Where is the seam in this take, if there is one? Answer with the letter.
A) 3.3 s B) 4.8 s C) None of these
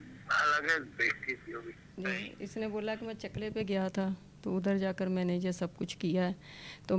C